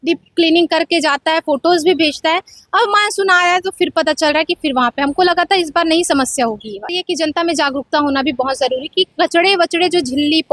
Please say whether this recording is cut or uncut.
cut